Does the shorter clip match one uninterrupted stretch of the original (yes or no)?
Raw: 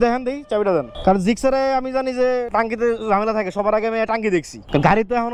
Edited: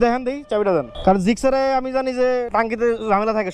yes